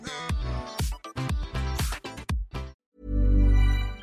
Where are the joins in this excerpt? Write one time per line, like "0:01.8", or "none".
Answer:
0:02.7